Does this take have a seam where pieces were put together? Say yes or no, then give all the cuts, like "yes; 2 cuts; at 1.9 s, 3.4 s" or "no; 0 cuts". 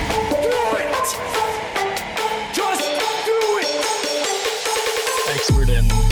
no; 0 cuts